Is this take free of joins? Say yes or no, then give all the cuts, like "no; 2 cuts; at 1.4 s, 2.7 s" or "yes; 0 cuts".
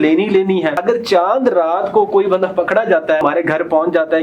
no; 2 cuts; at 0.8 s, 3.2 s